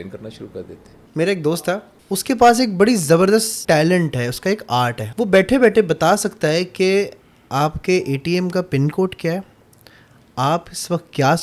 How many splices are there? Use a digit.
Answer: 3